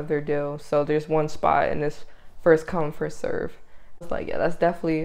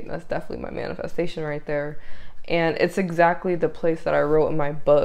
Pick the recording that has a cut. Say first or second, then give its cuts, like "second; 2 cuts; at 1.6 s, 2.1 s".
first; 1 cut; at 4.1 s